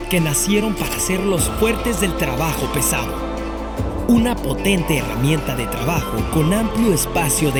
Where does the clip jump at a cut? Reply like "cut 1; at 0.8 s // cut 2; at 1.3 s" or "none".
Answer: none